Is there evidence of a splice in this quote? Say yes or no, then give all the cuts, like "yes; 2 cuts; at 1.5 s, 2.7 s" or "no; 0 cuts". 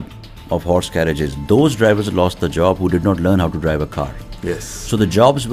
no; 0 cuts